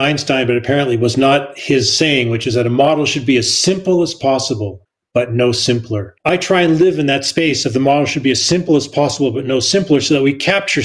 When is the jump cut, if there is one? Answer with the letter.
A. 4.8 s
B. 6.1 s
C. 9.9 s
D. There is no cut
B